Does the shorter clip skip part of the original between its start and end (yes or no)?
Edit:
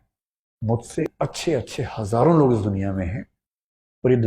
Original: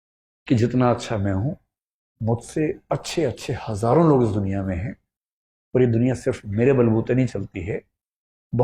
yes